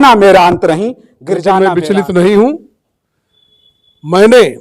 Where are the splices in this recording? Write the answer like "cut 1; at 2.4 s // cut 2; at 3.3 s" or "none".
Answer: cut 1; at 1.6 s

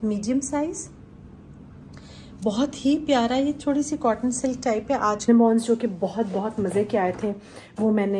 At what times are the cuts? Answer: cut 1; at 5.3 s

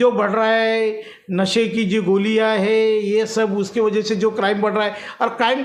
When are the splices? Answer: none

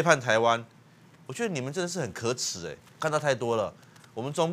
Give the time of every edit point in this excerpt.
cut 1; at 2.9 s

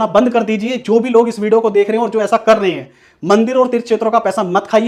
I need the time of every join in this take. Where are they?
none

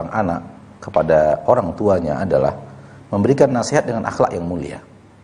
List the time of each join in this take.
none

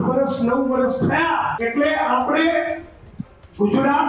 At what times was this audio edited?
cut 1; at 1.6 s

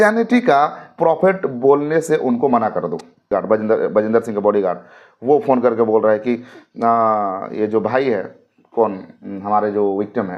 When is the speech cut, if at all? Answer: cut 1; at 3.3 s

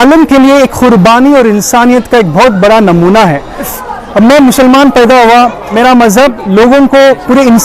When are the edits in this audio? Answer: cut 1; at 3.7 s // cut 2; at 5.7 s

